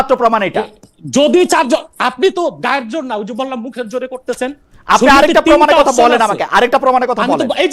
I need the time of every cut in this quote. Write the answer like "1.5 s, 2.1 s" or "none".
none